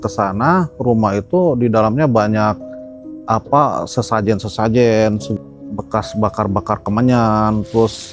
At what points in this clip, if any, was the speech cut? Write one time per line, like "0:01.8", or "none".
0:05.3